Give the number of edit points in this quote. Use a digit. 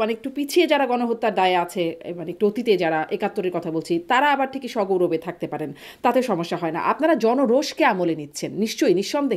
0